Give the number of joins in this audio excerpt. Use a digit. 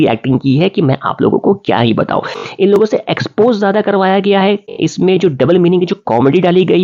2